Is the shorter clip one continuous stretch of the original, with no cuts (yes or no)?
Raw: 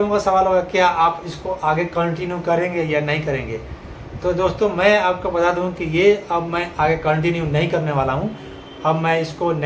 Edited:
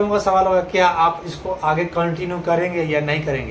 yes